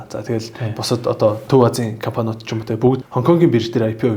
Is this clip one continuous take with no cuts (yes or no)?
no